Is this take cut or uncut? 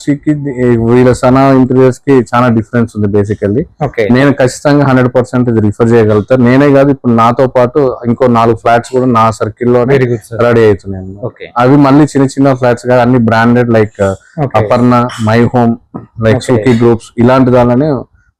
uncut